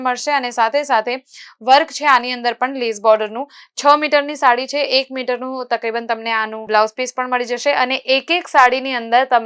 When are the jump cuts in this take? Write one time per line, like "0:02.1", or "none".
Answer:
none